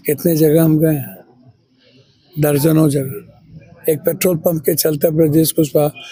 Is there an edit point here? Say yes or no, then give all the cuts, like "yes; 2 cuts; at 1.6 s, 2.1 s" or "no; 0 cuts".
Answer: no; 0 cuts